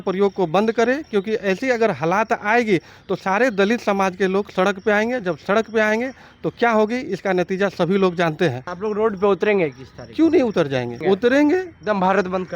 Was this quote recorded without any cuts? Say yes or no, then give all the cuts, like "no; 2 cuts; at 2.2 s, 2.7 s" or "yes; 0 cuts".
no; 2 cuts; at 8.7 s, 11.0 s